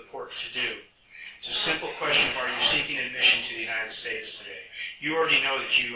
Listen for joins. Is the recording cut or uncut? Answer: uncut